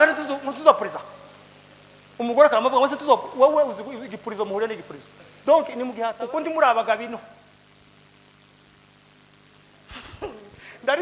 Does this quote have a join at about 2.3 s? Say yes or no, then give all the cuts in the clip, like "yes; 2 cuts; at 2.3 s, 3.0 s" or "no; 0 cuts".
no; 1 cut; at 6.0 s